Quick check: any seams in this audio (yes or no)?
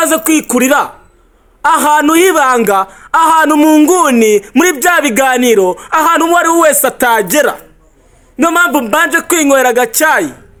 no